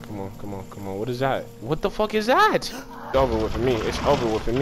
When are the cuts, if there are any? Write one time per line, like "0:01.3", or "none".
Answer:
0:03.1

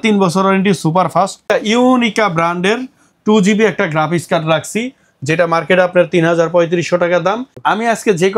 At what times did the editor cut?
0:01.4
0:07.5

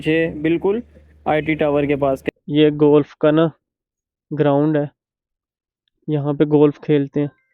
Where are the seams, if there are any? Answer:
0:02.2

